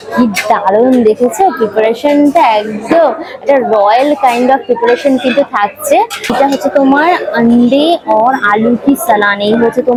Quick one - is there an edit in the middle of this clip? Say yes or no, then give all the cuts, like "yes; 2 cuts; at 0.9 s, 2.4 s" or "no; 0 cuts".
no; 0 cuts